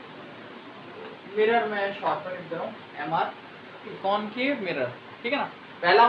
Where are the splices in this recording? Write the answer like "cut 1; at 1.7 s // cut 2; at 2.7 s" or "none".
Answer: cut 1; at 3.9 s